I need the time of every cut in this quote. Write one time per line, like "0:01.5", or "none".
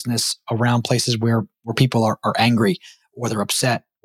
none